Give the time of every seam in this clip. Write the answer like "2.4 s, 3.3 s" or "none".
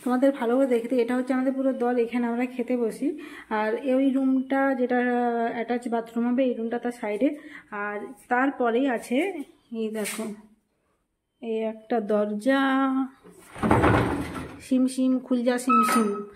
none